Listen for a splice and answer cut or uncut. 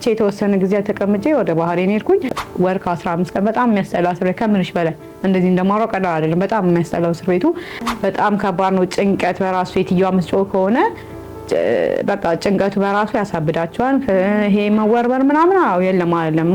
cut